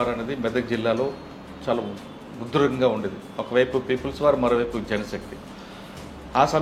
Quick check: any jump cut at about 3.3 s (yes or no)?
no